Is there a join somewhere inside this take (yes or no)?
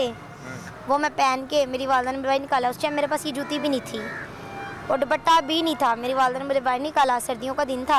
no